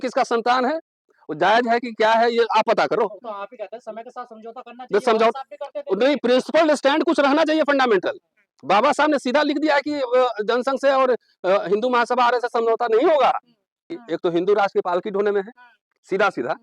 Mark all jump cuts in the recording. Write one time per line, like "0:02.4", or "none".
0:13.9